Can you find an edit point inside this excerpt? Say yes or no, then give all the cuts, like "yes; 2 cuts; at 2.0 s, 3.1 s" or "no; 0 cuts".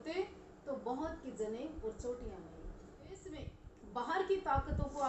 yes; 1 cut; at 3.2 s